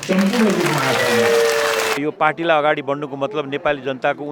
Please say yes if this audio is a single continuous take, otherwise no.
no